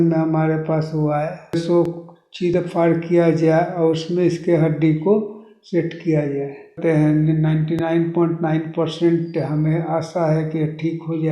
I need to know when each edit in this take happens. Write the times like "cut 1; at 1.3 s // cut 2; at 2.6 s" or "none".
cut 1; at 1.6 s // cut 2; at 6.8 s